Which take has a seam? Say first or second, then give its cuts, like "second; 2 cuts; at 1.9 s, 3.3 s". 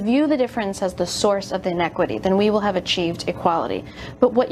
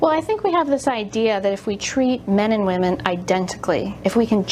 first; 1 cut; at 1.0 s